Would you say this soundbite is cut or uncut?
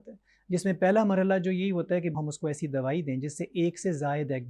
cut